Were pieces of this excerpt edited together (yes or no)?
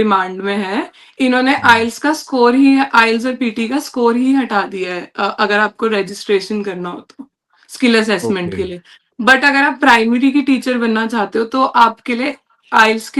no